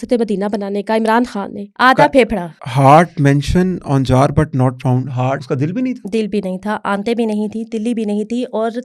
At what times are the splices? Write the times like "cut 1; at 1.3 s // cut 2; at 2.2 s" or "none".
cut 1; at 1.6 s // cut 2; at 2.6 s // cut 3; at 5.4 s